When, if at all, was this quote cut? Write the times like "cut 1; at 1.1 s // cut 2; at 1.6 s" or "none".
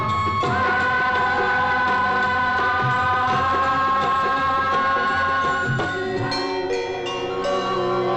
none